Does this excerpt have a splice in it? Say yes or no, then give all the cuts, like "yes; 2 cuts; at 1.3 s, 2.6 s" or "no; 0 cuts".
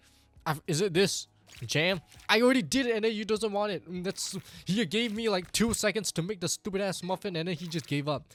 no; 0 cuts